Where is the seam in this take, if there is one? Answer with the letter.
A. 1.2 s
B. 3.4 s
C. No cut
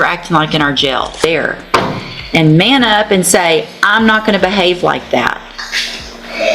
A